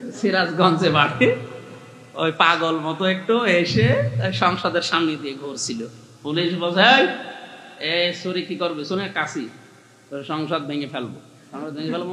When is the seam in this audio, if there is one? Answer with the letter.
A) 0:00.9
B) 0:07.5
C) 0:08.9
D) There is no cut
D